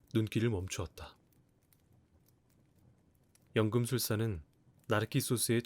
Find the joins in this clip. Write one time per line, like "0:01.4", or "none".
0:01.6
0:03.2